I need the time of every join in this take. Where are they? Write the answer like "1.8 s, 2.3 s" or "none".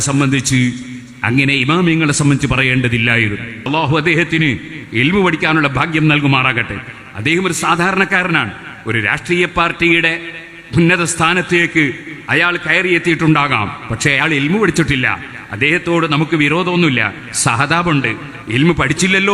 3.7 s